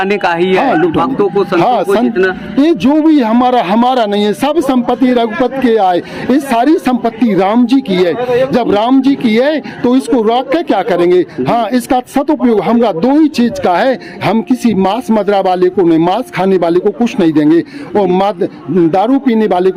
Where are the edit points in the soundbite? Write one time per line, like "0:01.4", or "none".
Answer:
none